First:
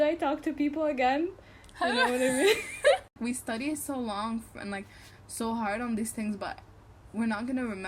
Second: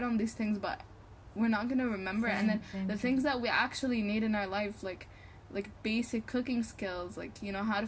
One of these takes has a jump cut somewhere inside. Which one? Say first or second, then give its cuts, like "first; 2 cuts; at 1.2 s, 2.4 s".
first; 1 cut; at 3.1 s